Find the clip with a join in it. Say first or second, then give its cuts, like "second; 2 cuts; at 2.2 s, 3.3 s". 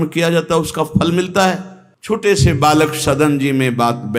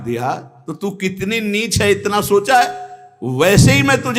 first; 1 cut; at 1.8 s